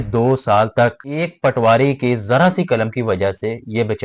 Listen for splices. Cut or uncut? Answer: cut